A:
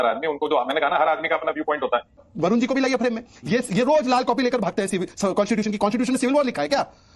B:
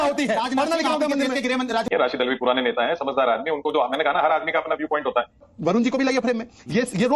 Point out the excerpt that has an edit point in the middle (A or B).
B